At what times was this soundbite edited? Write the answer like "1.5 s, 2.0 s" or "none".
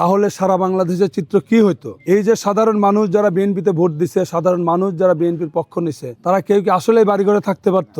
1.9 s, 6.1 s